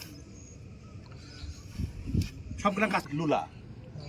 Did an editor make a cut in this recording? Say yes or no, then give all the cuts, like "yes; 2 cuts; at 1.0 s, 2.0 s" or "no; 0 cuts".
yes; 1 cut; at 3.1 s